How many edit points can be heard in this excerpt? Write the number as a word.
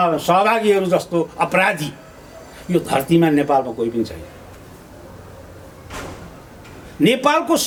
zero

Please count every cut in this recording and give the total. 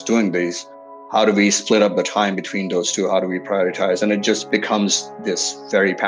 two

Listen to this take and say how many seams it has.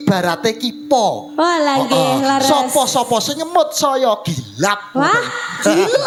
zero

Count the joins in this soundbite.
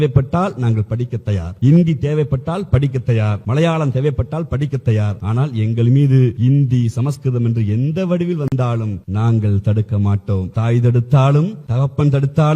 seven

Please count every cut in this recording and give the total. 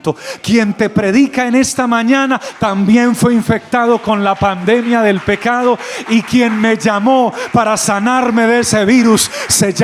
zero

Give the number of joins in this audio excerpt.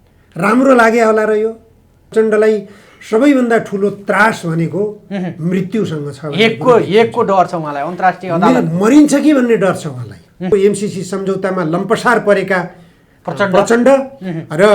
two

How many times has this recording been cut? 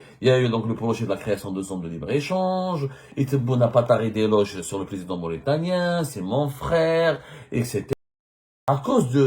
one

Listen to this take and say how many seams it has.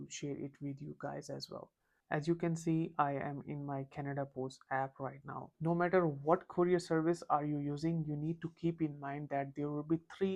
one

